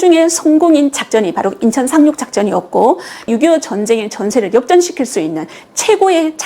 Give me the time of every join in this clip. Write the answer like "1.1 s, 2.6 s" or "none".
3.3 s